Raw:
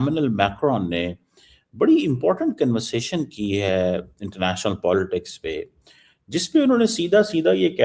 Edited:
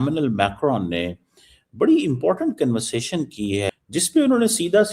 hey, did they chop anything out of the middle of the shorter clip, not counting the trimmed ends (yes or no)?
yes